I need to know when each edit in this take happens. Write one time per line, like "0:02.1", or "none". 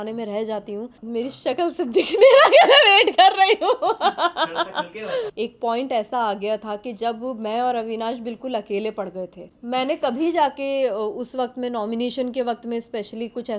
0:01.0
0:05.3
0:09.5